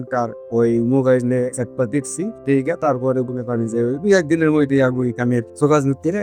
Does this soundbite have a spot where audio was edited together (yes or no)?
no